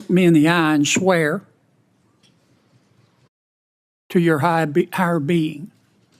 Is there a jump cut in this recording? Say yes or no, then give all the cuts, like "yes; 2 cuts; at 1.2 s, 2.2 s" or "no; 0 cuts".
no; 0 cuts